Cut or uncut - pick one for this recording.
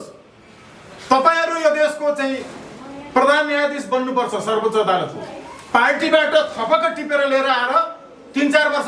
uncut